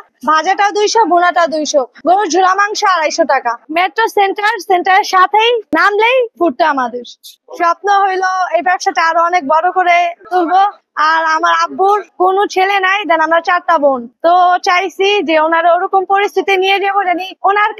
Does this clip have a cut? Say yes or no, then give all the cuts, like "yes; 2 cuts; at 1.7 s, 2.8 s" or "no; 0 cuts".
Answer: yes; 1 cut; at 7.3 s